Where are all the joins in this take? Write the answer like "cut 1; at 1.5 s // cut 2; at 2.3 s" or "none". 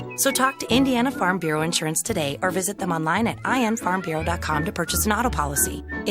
none